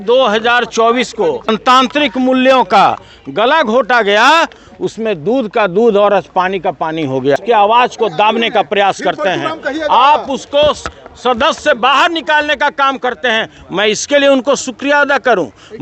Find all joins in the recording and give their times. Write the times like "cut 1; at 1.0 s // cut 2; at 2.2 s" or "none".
cut 1; at 1.6 s // cut 2; at 7.4 s